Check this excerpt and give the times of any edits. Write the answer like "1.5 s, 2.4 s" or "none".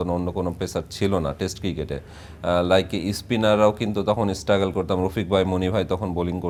none

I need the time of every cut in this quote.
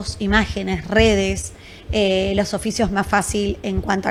none

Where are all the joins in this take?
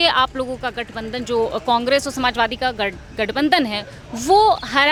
none

